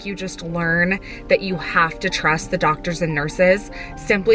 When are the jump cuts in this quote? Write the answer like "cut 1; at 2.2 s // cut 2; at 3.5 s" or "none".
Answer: none